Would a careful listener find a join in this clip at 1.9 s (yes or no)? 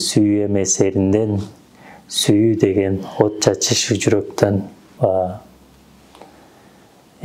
no